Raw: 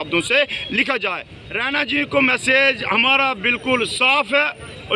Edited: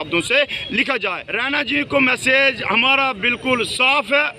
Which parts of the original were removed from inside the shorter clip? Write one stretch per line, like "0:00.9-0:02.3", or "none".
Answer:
0:01.3-0:01.5